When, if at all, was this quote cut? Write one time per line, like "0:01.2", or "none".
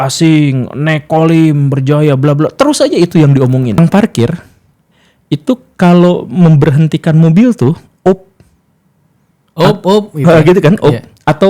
0:03.8